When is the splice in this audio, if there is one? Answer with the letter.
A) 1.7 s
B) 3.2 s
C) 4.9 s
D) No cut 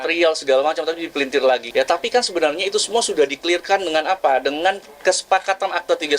A